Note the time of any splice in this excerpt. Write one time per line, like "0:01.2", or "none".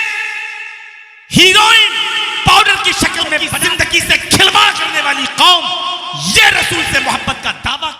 0:03.5